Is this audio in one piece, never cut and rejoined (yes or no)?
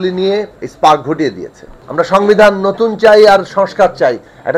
no